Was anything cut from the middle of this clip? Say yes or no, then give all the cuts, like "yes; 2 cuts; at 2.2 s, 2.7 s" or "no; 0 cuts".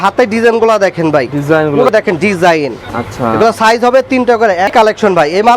yes; 2 cuts; at 1.9 s, 4.7 s